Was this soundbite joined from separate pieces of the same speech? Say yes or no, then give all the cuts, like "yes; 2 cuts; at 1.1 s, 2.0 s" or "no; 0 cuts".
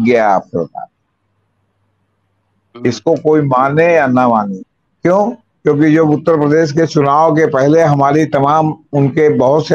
no; 0 cuts